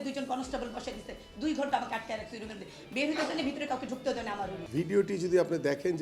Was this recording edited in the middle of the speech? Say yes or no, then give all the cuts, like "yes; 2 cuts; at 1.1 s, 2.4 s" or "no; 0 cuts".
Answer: yes; 1 cut; at 4.6 s